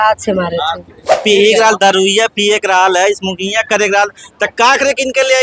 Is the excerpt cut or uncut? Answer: cut